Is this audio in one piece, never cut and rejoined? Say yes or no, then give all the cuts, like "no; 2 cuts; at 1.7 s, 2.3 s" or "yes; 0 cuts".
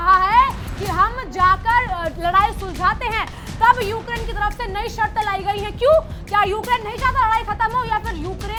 yes; 0 cuts